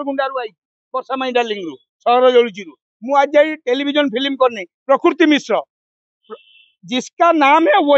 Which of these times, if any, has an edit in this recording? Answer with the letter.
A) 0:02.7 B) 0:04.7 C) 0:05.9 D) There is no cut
B